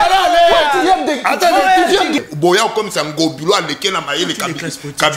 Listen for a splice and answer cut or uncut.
cut